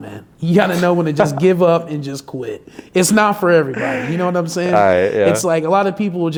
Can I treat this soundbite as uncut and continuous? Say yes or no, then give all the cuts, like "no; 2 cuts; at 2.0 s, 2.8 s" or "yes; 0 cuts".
yes; 0 cuts